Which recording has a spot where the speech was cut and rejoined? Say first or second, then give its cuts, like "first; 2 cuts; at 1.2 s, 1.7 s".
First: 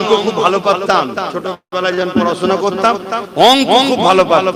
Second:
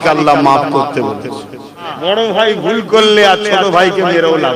second; 1 cut; at 1.9 s